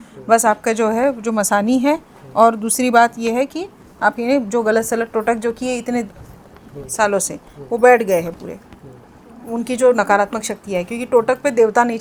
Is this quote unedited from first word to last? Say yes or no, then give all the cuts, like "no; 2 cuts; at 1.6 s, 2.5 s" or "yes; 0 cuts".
yes; 0 cuts